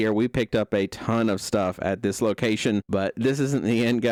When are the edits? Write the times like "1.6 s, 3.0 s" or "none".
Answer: none